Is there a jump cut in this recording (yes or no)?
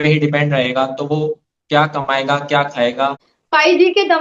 yes